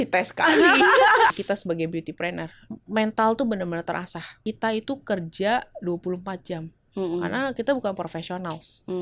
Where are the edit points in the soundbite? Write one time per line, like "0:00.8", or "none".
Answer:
0:01.3
0:02.6
0:04.3